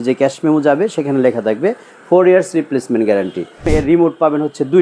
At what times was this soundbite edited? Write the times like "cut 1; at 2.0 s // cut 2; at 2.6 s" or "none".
cut 1; at 3.6 s